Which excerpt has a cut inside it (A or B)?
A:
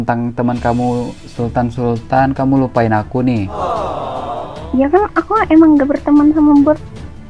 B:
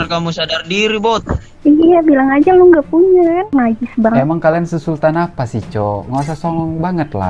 B